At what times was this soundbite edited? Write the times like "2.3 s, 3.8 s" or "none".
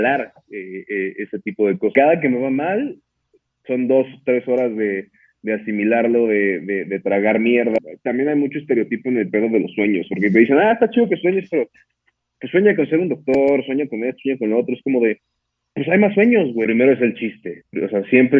1.9 s, 7.8 s, 16.6 s